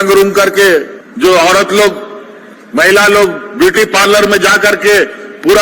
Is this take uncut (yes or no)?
no